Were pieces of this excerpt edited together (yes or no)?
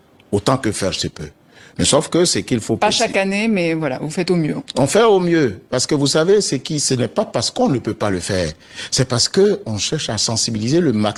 no